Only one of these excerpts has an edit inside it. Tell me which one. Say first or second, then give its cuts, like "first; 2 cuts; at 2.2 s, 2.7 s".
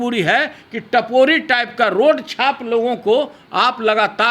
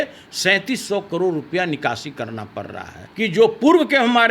second; 1 cut; at 3.0 s